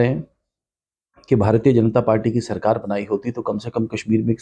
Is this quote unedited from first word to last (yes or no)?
yes